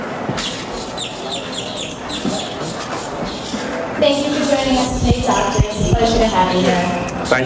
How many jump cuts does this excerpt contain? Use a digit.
0